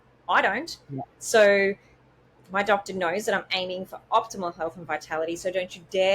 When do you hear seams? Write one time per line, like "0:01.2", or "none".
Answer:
none